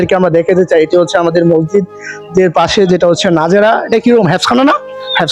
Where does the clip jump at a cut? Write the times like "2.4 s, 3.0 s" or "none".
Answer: none